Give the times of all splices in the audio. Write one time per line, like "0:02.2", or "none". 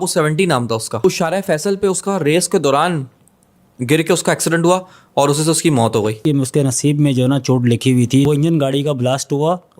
0:01.0
0:06.2
0:08.2